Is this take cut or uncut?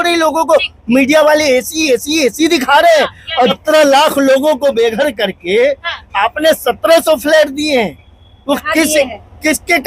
cut